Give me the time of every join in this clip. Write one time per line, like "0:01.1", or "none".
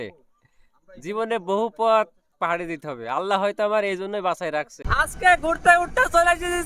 0:04.8